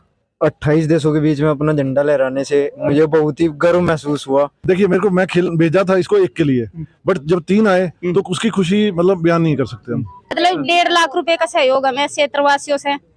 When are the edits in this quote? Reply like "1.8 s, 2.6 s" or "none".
4.6 s, 10.2 s